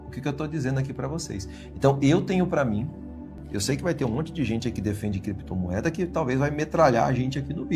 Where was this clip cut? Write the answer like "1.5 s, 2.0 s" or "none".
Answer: 3.3 s